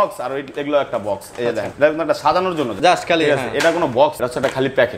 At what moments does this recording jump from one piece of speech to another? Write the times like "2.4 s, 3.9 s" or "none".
1.7 s, 2.7 s, 4.2 s